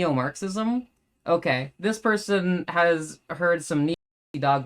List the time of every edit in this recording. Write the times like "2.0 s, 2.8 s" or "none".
none